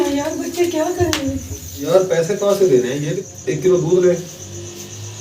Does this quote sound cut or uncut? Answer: cut